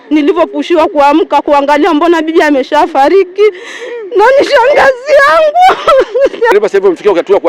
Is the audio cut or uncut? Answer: cut